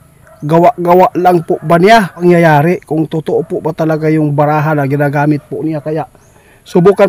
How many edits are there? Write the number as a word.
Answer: one